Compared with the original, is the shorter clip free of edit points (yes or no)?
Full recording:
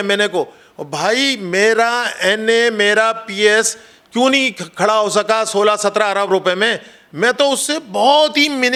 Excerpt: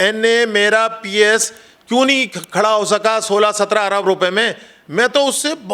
yes